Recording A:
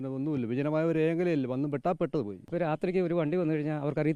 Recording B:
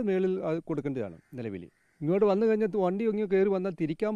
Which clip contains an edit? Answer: A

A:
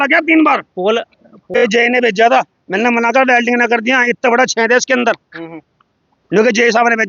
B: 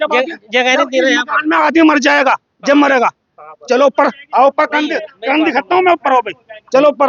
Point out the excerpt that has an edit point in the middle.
A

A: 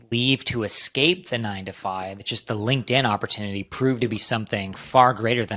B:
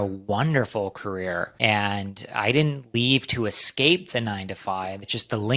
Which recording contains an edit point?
B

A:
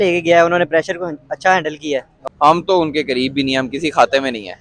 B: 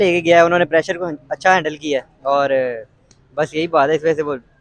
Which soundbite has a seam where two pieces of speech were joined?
A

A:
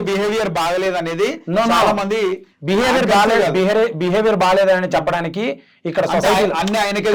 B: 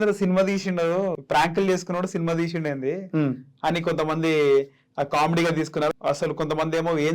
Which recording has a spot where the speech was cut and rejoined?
B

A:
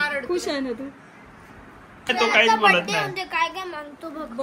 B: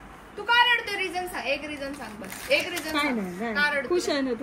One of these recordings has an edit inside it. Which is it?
A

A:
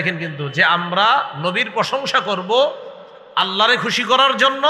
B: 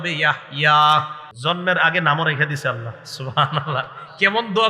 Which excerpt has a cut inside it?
B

